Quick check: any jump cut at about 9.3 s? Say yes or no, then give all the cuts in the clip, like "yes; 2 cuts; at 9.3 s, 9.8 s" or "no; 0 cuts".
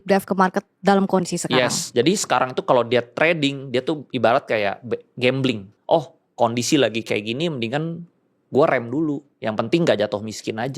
yes; 2 cuts; at 5.7 s, 9.3 s